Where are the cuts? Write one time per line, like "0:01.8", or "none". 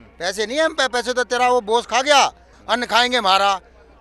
0:02.5